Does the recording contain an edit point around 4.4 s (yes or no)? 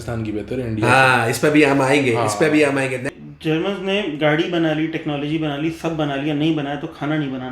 no